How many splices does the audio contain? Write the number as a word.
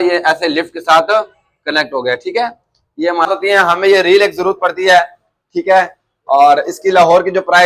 one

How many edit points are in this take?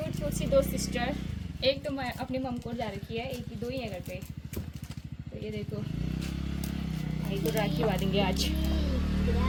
zero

